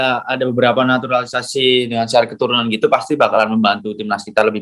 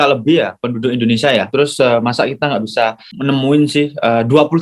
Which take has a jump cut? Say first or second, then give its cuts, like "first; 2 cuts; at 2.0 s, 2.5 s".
second; 2 cuts; at 1.5 s, 3.1 s